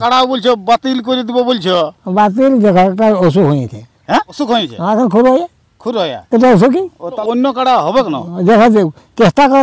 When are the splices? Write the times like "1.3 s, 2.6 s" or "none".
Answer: 4.3 s, 7.2 s

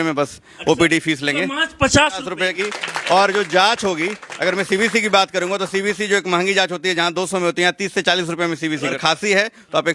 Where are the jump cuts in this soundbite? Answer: 2.5 s, 9.0 s

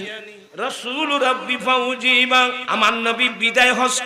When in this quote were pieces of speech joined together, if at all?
2.6 s

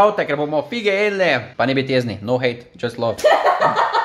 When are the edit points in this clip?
1.5 s, 3.2 s

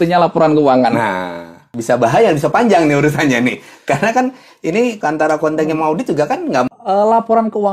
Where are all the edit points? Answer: 1.8 s, 5.0 s, 6.7 s

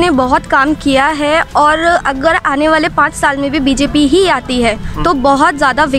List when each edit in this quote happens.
none

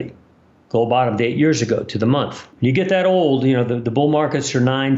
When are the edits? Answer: 2.4 s

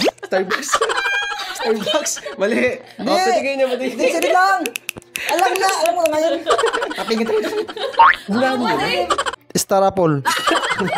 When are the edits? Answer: 9.3 s

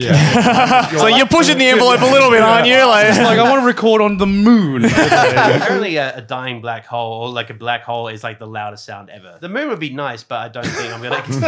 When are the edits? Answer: 0.9 s, 5.6 s, 9.3 s

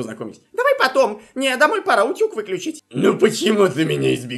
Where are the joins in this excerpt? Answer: 2.8 s

